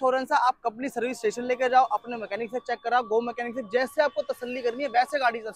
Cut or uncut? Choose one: uncut